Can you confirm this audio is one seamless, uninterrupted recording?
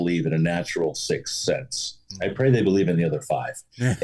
yes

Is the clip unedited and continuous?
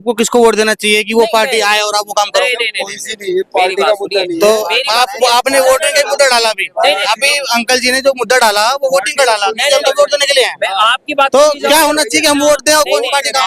yes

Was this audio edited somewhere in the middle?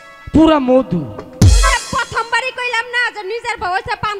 no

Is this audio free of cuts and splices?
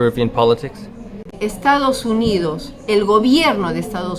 yes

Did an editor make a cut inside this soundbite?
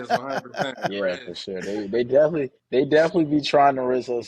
yes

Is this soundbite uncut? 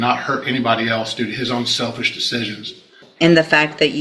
no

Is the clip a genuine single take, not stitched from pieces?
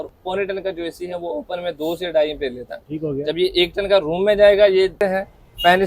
no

